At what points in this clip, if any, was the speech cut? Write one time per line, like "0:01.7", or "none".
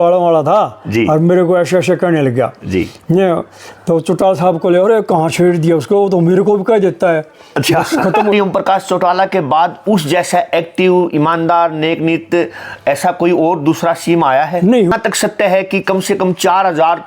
0:08.3
0:14.9